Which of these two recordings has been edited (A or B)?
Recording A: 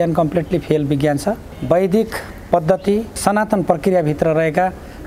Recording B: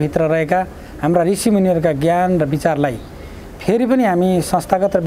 A